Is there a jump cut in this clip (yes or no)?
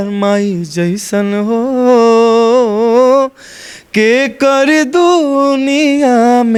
no